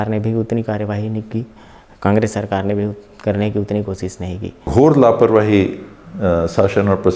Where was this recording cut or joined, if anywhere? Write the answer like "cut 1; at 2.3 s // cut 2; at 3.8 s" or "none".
cut 1; at 4.6 s